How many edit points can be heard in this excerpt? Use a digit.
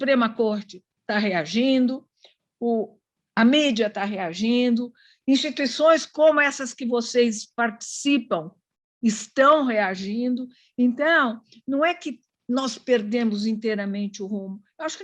0